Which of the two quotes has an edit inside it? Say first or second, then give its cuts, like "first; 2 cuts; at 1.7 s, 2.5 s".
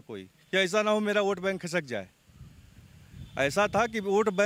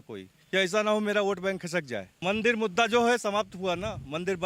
second; 1 cut; at 2.0 s